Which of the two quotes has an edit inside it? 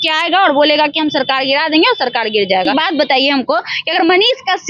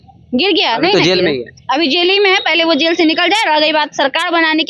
first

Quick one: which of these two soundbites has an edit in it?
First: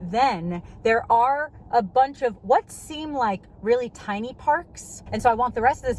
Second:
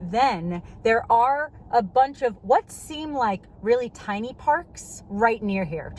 first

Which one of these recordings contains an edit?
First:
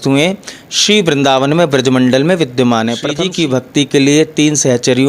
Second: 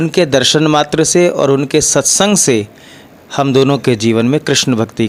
first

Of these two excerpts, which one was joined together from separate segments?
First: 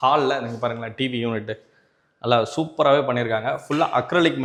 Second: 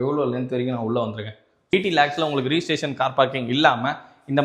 second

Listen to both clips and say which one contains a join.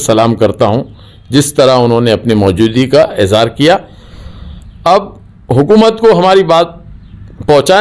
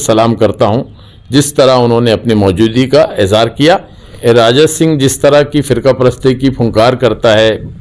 second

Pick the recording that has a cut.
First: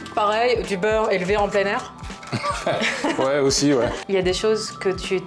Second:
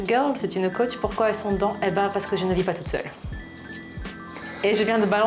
first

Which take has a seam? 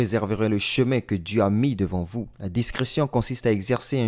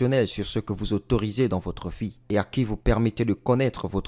first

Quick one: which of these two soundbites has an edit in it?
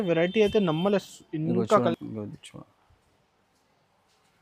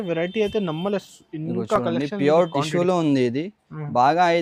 first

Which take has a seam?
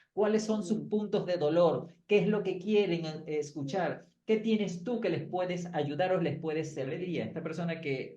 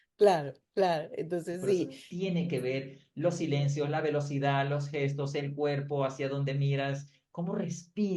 first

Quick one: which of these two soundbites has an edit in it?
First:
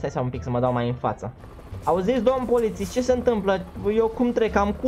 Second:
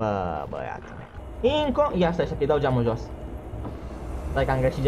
second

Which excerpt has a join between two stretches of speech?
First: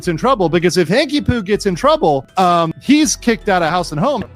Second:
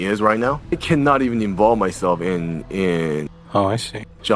second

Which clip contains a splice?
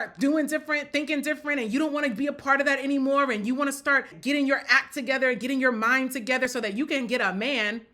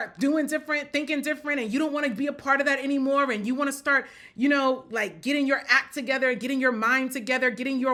first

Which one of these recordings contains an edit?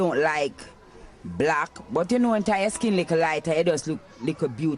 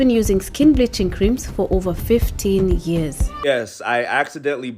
second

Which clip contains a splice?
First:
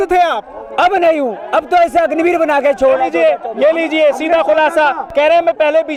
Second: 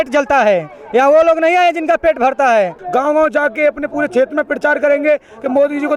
second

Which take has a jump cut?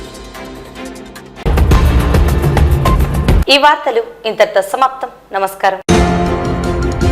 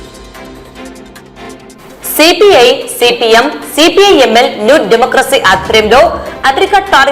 second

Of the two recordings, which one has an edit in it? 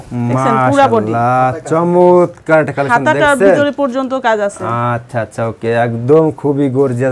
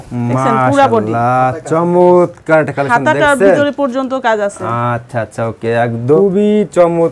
second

